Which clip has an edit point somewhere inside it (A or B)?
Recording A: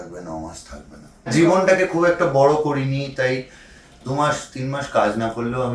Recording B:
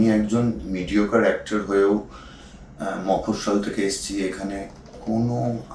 A